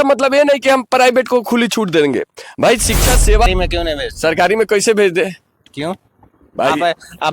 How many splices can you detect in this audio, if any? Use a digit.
1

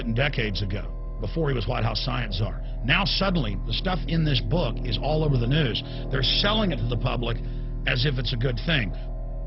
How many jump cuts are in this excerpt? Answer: 0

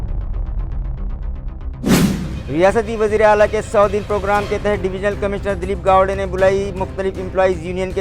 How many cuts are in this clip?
0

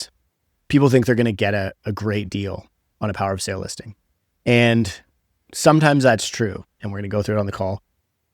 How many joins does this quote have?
1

